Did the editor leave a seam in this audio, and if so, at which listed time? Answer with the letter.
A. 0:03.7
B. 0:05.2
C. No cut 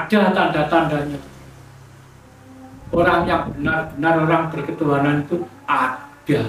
C